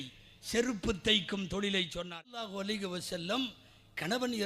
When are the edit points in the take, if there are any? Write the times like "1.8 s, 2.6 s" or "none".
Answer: 2.0 s